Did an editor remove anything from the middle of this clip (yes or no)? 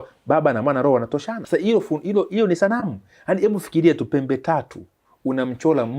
yes